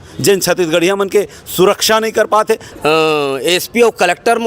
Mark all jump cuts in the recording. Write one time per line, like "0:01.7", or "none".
0:02.7